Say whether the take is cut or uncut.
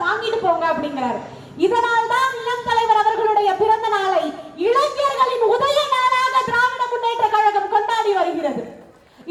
uncut